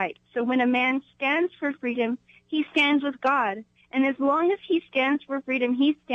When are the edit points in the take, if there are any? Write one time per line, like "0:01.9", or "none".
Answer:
none